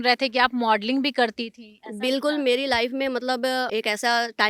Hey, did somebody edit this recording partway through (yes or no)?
no